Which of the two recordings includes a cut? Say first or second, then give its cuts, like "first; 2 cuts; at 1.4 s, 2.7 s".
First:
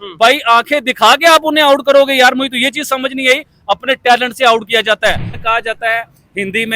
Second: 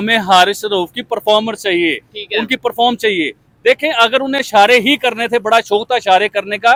first; 1 cut; at 5.3 s